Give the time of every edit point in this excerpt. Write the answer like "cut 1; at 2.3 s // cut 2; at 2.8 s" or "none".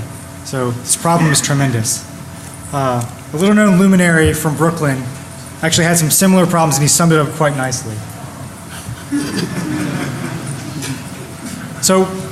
none